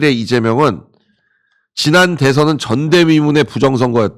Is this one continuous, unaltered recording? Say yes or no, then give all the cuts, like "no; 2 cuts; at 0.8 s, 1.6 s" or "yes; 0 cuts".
yes; 0 cuts